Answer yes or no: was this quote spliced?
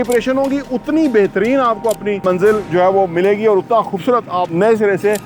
yes